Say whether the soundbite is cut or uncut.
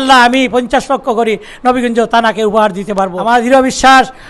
cut